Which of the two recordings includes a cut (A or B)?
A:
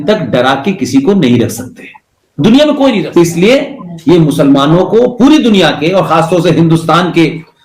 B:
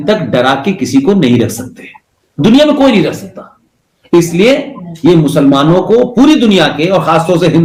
A